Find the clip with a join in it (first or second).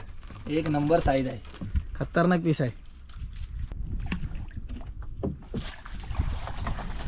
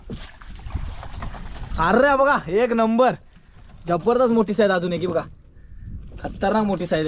first